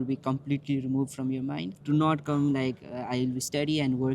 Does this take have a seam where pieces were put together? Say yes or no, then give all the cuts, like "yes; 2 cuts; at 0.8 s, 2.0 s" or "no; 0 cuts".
yes; 1 cut; at 1.8 s